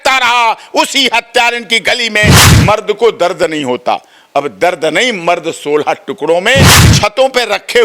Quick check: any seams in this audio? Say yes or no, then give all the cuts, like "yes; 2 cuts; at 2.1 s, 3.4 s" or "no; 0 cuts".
yes; 2 cuts; at 2.4 s, 6.8 s